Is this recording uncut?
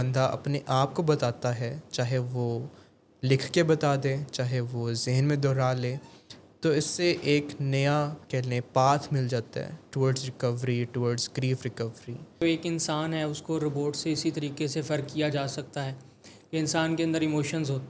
no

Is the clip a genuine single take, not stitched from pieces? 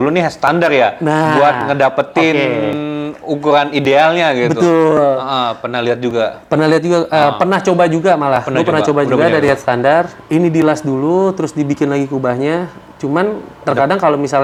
yes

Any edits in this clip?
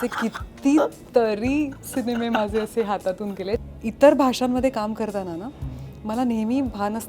yes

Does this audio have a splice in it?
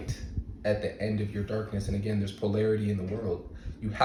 no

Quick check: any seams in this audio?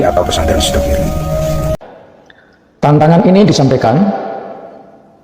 yes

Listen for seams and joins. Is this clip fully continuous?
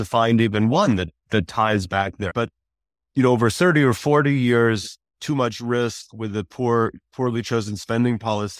no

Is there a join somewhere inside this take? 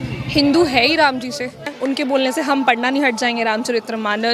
yes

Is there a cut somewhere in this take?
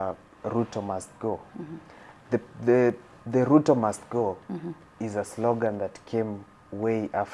no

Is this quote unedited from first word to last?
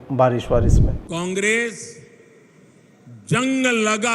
no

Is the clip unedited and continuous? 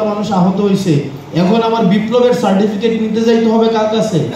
yes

